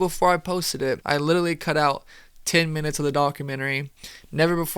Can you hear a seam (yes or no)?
yes